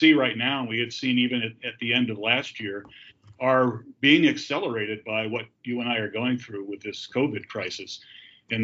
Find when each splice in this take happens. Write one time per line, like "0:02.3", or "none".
none

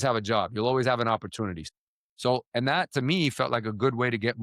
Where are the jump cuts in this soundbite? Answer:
0:01.6

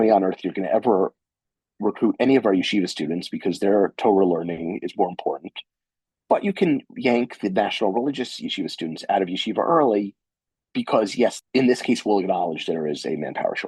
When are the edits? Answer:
0:11.4

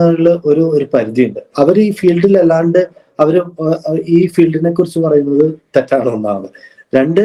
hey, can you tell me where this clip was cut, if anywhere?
none

